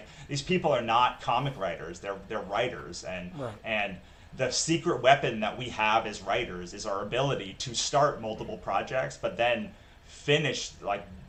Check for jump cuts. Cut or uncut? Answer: uncut